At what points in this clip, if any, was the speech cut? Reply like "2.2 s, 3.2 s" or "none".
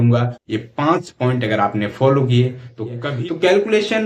3.0 s